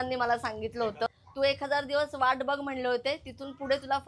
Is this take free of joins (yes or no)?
no